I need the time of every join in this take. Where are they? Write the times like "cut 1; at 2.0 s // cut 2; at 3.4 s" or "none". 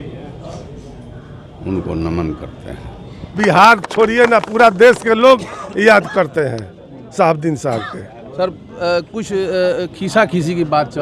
cut 1; at 3.3 s